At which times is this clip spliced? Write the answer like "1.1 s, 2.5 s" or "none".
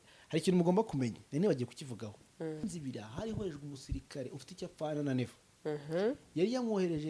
2.6 s